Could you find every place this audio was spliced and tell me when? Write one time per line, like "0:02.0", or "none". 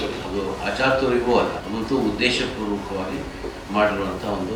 0:01.6